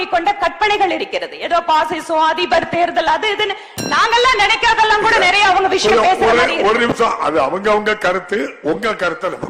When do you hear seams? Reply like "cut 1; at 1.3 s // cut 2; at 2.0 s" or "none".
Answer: none